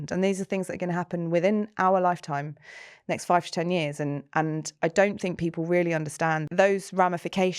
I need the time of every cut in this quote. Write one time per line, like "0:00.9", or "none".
0:06.4